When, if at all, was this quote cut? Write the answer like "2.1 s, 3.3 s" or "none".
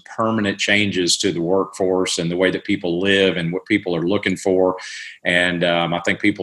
none